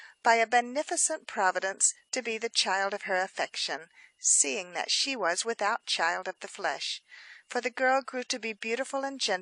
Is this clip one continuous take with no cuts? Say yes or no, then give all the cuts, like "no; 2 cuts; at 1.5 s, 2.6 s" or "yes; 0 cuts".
no; 1 cut; at 4.8 s